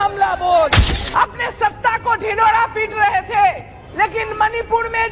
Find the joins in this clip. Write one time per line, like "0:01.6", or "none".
0:00.9

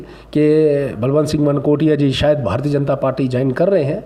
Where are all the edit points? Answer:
none

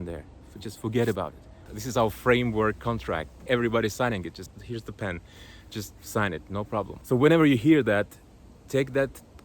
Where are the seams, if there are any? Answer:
0:01.6
0:03.4
0:04.5
0:07.0

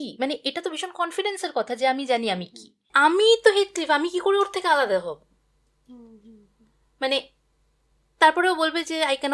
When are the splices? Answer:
0:02.9

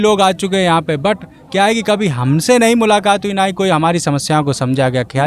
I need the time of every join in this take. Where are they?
none

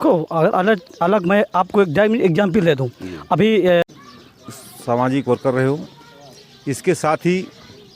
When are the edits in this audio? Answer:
0:03.8

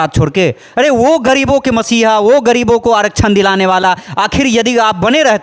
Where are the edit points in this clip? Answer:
none

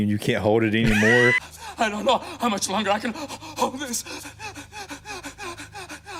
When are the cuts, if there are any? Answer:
none

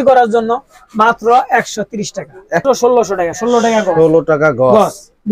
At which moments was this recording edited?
0:02.6

